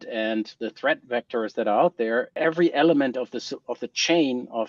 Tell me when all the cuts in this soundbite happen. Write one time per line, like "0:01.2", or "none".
0:02.3